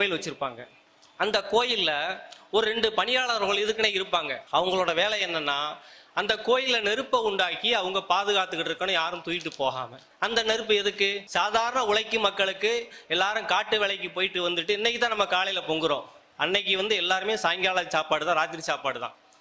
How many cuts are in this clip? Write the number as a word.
three